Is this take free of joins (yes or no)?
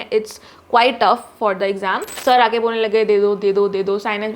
no